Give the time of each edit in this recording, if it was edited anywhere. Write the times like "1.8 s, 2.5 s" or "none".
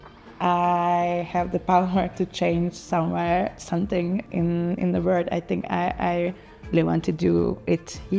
none